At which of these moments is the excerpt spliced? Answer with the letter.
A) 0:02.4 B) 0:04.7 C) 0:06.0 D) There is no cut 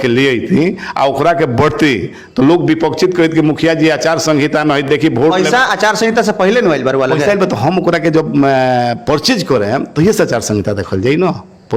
D